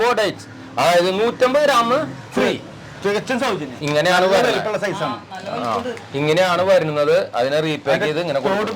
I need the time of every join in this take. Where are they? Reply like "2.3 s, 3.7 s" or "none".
3.8 s

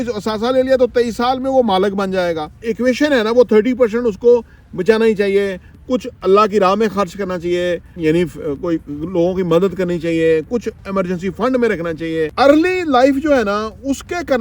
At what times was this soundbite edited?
2.6 s, 7.9 s, 12.3 s

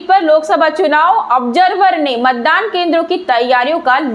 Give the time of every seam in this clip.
none

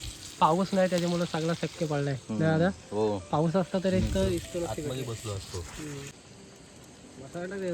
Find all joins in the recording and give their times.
6.2 s

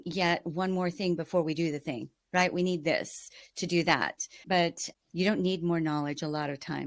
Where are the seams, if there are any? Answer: 4.6 s

